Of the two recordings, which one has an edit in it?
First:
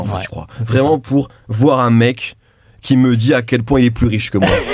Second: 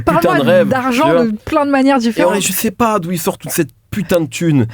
second; 1 cut; at 2.3 s

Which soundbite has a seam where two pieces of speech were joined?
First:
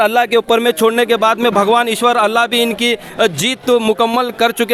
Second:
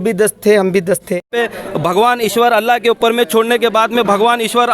second; 1 cut; at 1.3 s

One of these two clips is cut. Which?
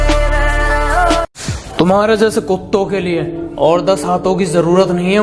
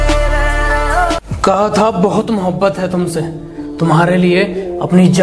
first; 1 cut; at 1.1 s

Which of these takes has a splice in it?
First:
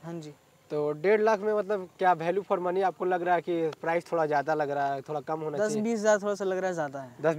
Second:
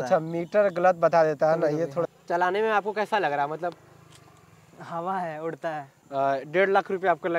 second; 2 cuts; at 2.1 s, 5.9 s

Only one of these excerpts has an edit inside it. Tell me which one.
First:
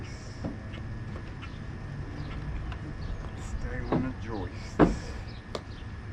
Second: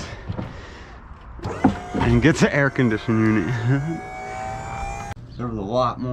second; 1 cut; at 5.1 s

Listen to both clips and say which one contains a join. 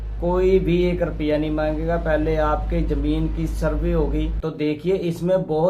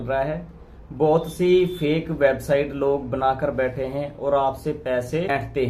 first; 1 cut; at 4.3 s

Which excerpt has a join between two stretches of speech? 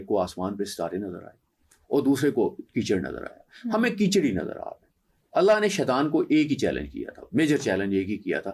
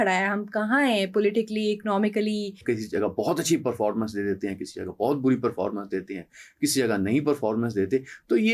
second; 1 cut; at 2.6 s

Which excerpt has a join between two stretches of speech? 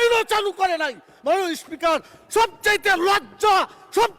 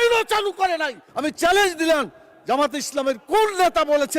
second; 1 cut; at 1.0 s

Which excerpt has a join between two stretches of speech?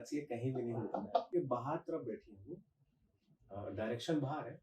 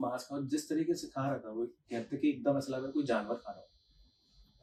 first; 1 cut; at 1.3 s

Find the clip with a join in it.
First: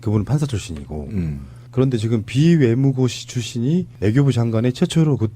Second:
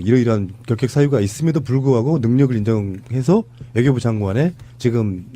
second; 1 cut; at 3.5 s

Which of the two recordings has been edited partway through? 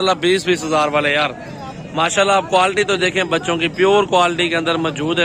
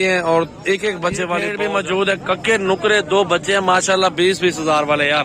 second; 1 cut; at 1.5 s

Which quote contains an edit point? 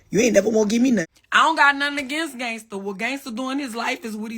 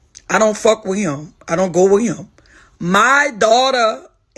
first; 1 cut; at 1.0 s

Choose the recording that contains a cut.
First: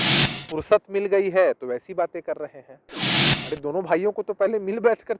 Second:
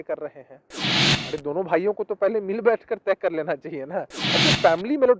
second; 1 cut; at 4.2 s

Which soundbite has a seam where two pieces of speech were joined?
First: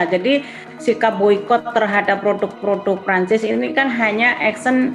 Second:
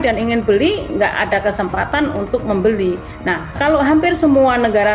second; 1 cut; at 3.5 s

